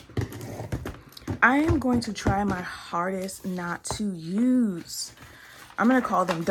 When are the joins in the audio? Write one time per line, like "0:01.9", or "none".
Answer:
none

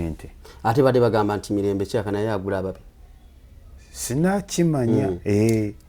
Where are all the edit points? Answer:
none

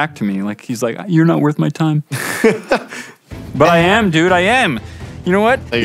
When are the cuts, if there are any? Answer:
none

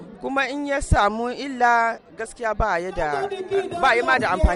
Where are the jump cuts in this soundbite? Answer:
none

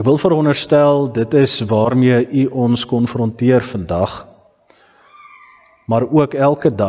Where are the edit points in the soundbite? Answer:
none

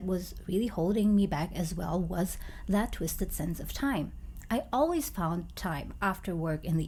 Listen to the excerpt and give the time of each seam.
none

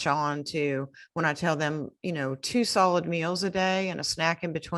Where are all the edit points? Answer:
none

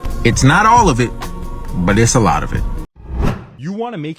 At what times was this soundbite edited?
0:03.1

